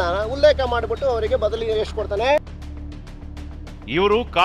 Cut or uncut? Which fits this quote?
uncut